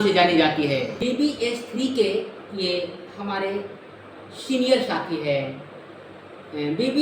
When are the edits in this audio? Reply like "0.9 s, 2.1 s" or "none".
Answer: 1.1 s